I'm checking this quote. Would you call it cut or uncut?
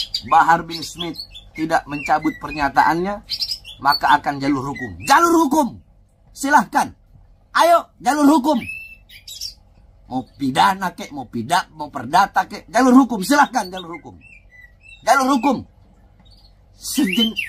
uncut